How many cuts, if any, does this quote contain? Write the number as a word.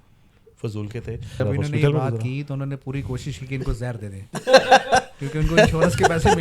one